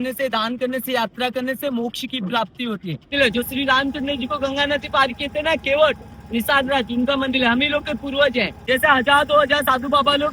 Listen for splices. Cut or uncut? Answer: cut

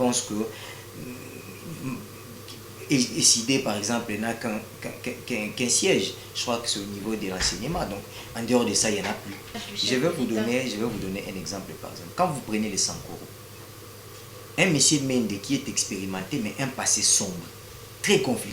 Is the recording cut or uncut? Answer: cut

